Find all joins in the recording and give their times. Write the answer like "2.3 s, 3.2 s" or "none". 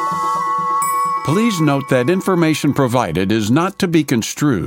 1.2 s